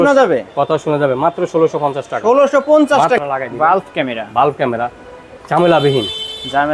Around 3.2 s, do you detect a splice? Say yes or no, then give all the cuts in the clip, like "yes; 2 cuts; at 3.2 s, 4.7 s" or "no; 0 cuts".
yes; 1 cut; at 3.2 s